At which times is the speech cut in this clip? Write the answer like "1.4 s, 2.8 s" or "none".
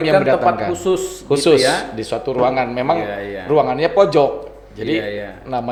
none